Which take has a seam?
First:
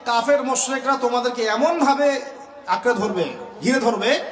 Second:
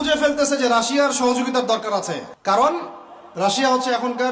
second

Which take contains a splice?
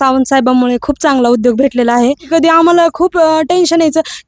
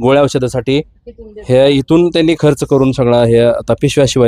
first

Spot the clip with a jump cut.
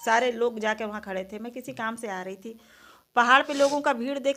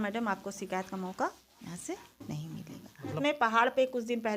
second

